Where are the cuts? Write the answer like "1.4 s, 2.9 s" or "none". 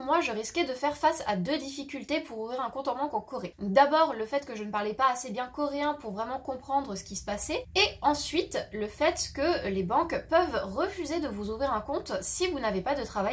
3.5 s, 7.7 s

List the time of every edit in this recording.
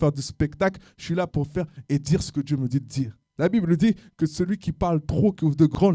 3.2 s

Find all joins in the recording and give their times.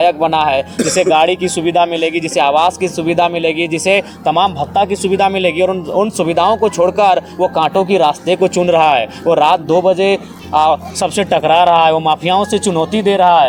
none

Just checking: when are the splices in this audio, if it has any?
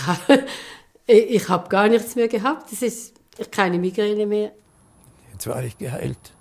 4.6 s

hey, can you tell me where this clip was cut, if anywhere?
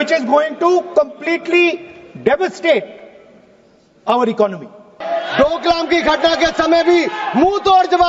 5.0 s

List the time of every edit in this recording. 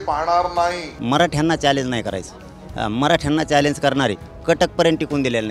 0.9 s, 4.3 s

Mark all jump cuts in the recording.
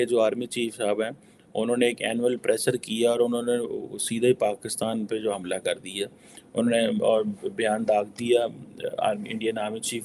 none

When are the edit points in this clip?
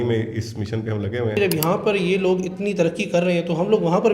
1.4 s

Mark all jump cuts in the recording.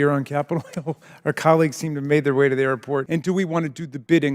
3.1 s

